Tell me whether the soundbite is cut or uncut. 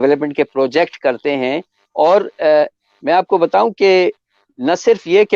uncut